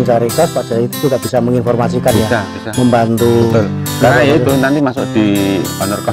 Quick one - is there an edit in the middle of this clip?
no; 0 cuts

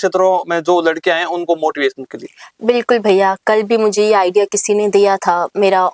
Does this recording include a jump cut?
no; 0 cuts

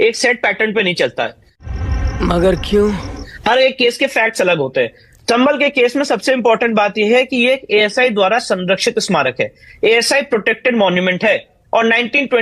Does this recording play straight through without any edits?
yes; 0 cuts

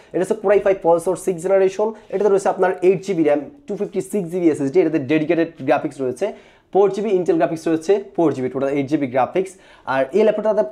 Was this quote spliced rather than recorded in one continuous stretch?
no; 0 cuts

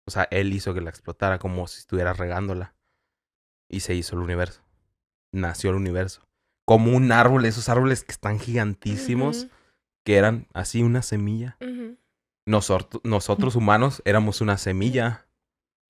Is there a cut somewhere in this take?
no; 0 cuts

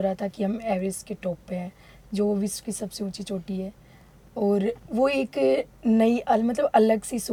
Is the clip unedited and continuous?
yes; 0 cuts

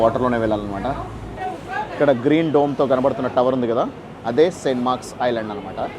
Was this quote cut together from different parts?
yes; 1 cut; at 1.4 s

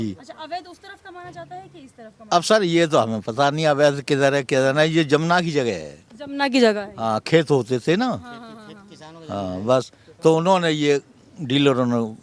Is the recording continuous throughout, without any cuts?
yes; 0 cuts

